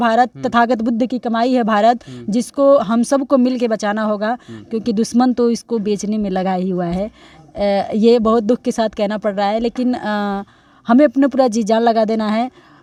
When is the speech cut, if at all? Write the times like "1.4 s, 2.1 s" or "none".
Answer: none